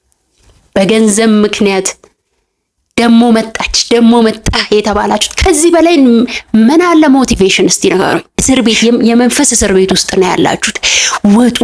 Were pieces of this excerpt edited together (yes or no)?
yes